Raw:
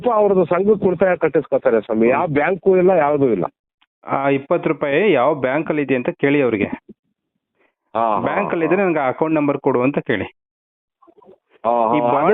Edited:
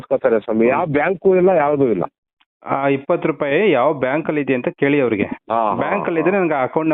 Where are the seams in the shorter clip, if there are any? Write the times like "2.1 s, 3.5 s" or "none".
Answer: 5.4 s